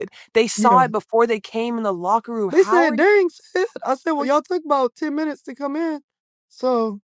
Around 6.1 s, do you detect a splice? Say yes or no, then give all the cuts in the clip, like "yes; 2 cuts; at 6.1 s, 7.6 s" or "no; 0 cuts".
no; 2 cuts; at 2.5 s, 4.2 s